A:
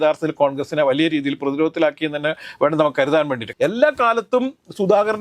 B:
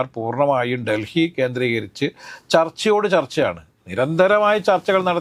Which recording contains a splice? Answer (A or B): A